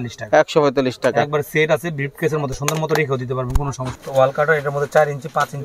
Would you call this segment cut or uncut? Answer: cut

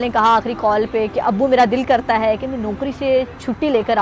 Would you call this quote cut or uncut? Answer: uncut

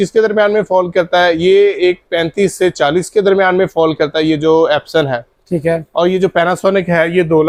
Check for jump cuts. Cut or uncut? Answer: uncut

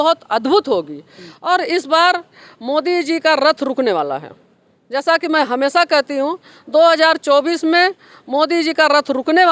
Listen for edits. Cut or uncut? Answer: uncut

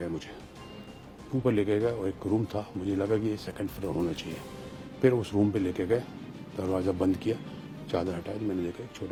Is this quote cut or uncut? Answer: uncut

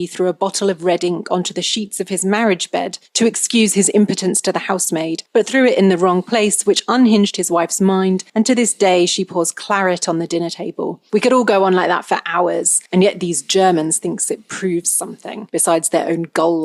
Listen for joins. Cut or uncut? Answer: uncut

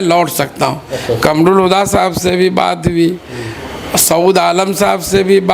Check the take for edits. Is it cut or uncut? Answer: uncut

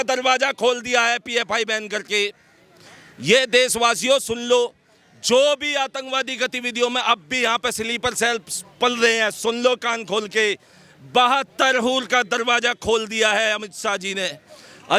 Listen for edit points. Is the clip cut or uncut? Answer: uncut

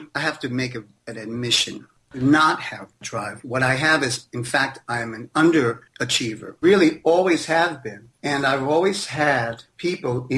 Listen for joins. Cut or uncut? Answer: cut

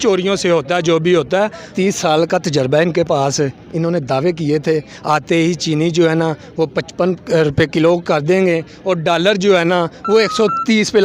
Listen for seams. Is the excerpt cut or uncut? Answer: cut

